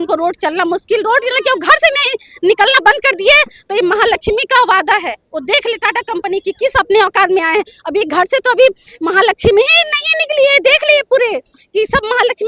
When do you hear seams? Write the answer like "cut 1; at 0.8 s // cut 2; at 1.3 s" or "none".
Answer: none